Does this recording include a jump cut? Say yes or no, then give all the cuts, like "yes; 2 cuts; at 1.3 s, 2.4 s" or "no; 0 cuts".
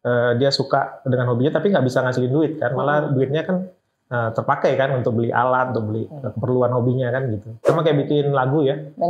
yes; 1 cut; at 7.7 s